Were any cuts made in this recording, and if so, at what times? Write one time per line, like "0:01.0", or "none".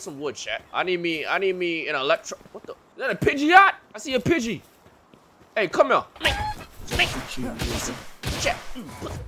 none